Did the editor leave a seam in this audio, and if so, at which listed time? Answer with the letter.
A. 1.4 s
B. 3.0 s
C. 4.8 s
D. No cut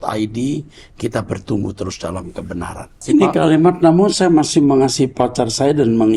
B